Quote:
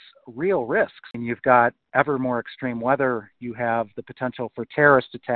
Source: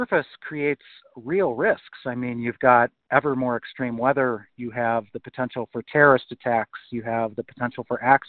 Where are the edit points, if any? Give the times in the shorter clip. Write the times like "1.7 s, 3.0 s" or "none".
1.1 s